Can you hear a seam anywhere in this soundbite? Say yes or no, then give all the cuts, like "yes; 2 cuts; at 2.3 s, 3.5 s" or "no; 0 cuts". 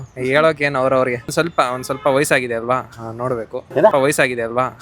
yes; 1 cut; at 1.3 s